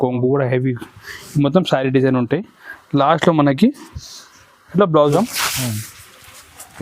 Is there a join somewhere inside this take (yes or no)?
yes